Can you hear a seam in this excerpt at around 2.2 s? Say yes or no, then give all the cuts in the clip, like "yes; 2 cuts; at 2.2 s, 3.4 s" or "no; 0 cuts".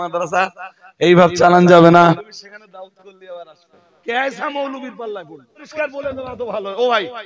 yes; 3 cuts; at 2.2 s, 4.0 s, 5.7 s